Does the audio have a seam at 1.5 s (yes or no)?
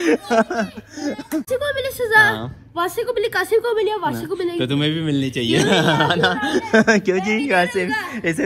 yes